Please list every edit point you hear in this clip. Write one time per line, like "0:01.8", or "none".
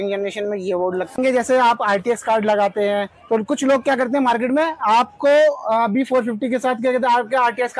0:01.2